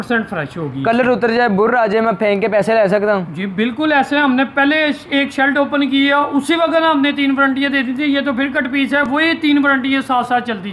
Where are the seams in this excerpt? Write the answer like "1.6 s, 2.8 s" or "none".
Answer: none